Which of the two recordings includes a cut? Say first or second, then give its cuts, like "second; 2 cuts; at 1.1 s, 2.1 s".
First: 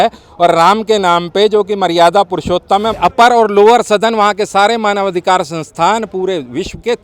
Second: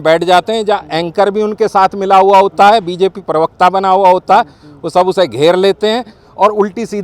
first; 1 cut; at 3.0 s